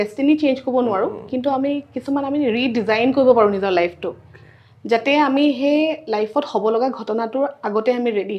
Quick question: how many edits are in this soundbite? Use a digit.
0